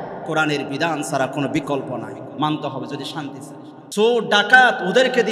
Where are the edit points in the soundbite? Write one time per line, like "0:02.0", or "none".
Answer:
0:03.8